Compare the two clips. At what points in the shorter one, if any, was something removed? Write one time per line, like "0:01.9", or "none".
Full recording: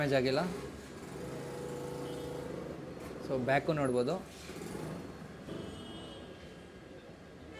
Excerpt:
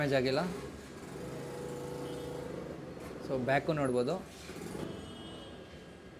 0:04.8

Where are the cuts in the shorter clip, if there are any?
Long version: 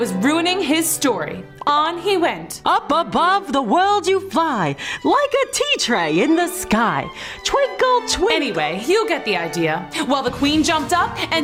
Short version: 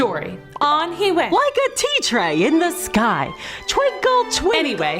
0:01.3

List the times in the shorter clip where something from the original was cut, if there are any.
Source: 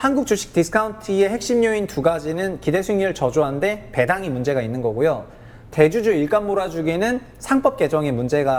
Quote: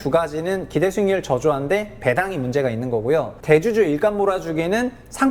0:03.3

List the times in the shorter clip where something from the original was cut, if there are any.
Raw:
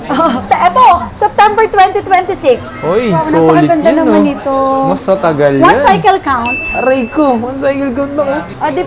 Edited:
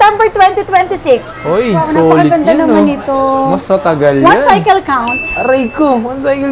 none

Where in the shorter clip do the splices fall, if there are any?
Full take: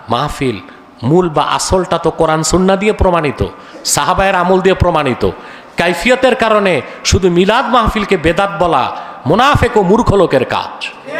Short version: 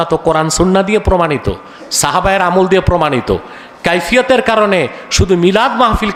none

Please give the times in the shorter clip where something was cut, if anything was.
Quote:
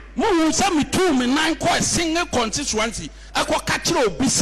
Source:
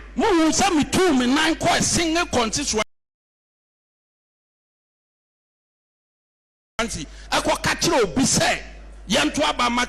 0:02.8

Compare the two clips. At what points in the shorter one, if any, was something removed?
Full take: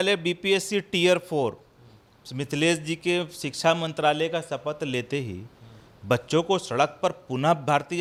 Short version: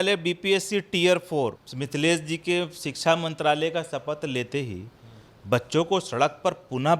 0:01.7

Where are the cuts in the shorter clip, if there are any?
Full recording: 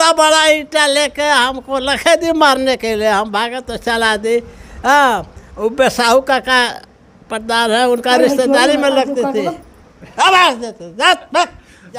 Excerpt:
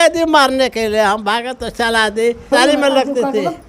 0:02.5

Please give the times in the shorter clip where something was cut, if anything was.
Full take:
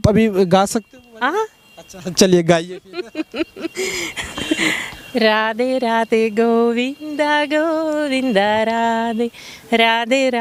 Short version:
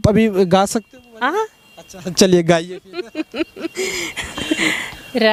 none

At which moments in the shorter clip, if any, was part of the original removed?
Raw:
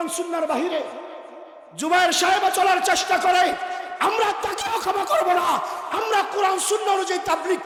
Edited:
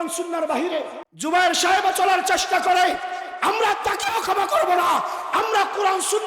0:01.0

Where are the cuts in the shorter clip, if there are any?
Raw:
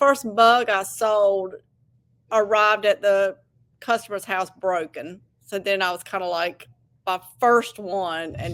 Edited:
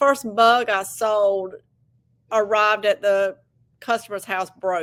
none

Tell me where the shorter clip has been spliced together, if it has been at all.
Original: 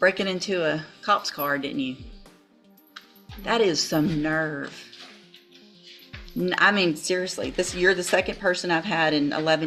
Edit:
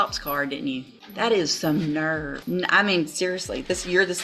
0:01.0
0:02.4

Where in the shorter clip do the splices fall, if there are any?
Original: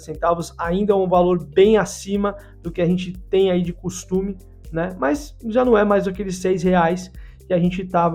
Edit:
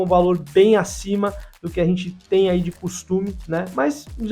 0:03.4

